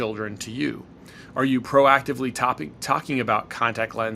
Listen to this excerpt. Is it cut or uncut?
uncut